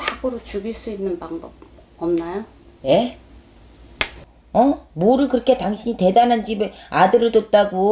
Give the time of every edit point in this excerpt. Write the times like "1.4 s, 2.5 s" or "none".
4.2 s